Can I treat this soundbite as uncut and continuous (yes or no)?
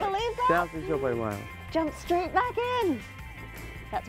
yes